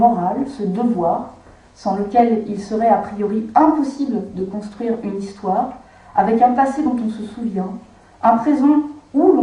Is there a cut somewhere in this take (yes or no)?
yes